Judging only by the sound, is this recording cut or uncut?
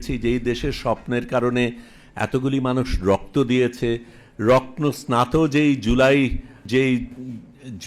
cut